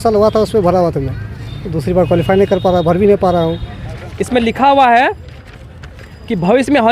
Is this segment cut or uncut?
cut